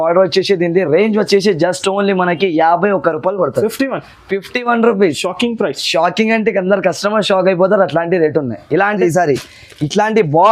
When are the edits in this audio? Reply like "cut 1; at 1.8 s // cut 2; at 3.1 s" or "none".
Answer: cut 1; at 9.0 s